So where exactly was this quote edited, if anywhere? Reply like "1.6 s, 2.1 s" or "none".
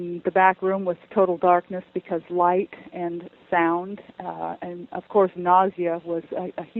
none

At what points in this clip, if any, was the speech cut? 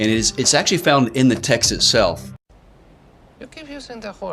2.4 s

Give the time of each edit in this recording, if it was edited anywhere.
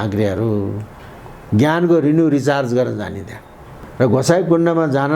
3.8 s

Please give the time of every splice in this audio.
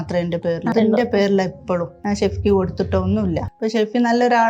0.7 s, 1.9 s, 3.5 s

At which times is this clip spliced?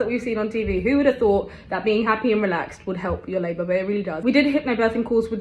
none

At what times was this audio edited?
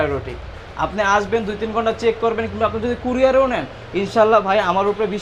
none

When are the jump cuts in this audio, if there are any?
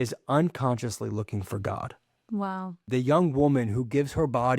2.8 s

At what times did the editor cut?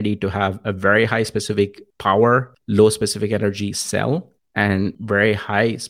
1.9 s, 2.6 s, 4.8 s

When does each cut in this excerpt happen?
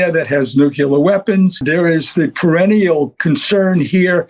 1.6 s

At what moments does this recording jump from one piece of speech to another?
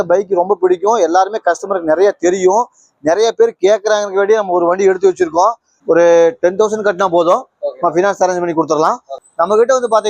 5.7 s, 9.2 s

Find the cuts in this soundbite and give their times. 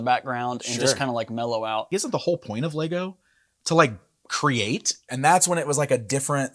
1.9 s, 5.1 s

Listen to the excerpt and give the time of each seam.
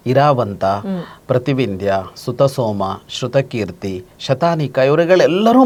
none

